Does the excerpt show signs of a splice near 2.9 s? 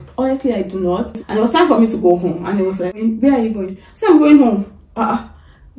yes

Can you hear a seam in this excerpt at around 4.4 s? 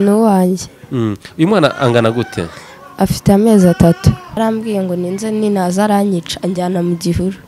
yes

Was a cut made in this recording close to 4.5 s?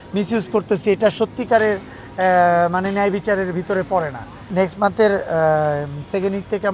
yes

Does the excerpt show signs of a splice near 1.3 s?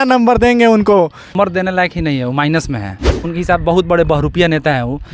yes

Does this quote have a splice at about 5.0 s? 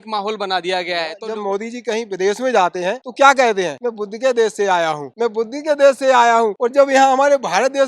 yes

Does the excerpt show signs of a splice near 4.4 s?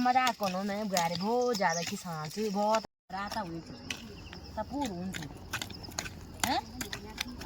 no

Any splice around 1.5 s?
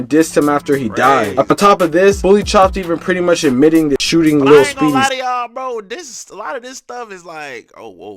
yes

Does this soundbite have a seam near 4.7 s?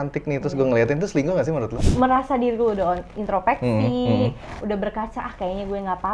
no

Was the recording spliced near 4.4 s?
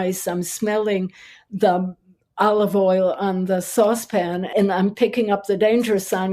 yes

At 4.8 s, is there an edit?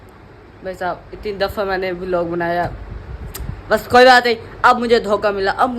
no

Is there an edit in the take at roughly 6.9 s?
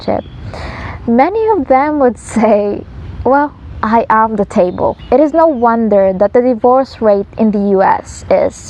no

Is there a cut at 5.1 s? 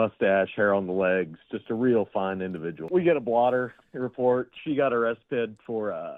no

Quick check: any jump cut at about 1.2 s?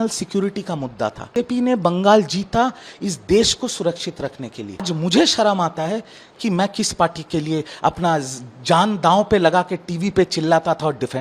yes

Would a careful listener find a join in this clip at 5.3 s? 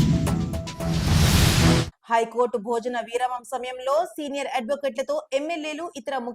no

